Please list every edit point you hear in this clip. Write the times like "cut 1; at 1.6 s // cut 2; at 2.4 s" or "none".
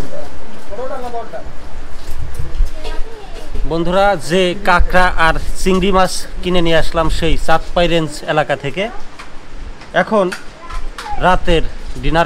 none